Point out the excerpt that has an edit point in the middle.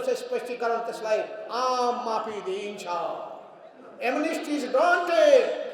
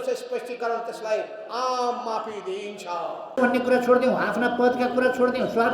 second; 1 cut; at 3.4 s

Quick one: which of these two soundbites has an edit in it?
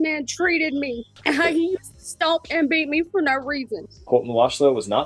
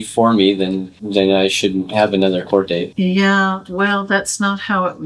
first; 1 cut; at 3.9 s

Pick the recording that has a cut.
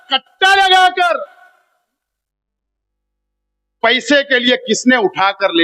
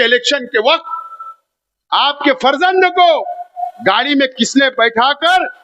second; 1 cut; at 3.6 s

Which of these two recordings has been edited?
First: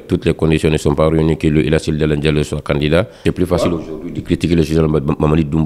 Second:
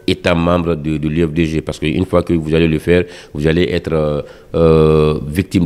first; 1 cut; at 3.2 s

